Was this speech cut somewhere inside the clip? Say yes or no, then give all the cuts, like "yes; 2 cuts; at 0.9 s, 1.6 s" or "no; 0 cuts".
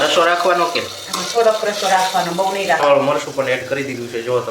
yes; 1 cut; at 2.8 s